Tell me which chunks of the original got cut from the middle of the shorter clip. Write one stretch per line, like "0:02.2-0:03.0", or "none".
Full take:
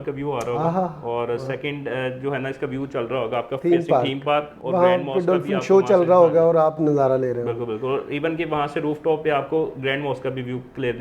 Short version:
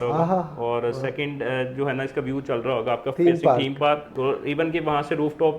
0:04.6-0:07.8